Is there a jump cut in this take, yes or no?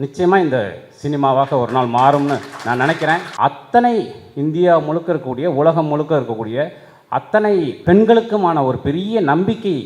yes